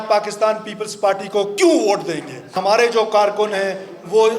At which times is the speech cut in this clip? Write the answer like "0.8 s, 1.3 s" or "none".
2.6 s